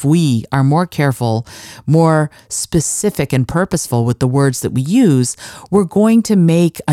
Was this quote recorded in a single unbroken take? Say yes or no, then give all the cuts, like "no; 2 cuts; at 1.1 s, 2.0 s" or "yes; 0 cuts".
yes; 0 cuts